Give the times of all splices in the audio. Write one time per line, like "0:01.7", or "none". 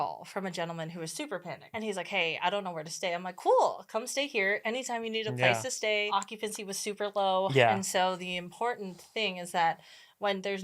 0:01.7
0:06.1